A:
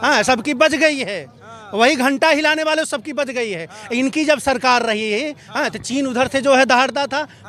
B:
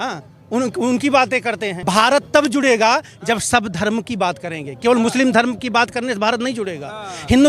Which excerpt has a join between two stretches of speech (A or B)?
B